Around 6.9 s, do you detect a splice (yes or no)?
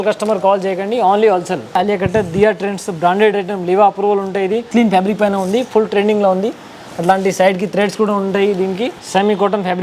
no